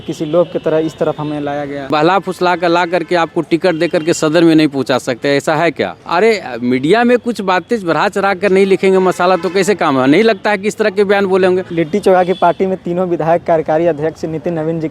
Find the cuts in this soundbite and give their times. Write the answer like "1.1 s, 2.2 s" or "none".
1.9 s, 6.0 s, 11.7 s